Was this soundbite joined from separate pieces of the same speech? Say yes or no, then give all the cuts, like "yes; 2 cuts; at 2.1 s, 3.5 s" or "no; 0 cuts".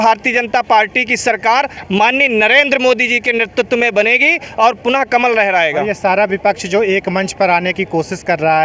no; 0 cuts